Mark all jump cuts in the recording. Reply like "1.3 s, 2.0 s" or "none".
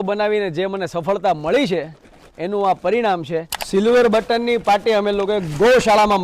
3.6 s